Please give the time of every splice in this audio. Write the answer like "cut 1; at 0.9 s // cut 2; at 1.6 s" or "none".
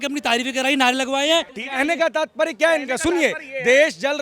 cut 1; at 1.6 s